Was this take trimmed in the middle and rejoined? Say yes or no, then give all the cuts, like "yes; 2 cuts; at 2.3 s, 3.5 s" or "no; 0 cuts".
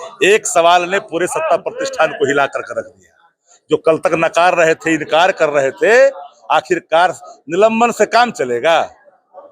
no; 0 cuts